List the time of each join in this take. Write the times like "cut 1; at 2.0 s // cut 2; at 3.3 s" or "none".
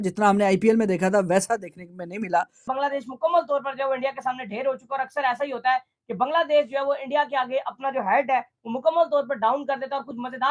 cut 1; at 2.6 s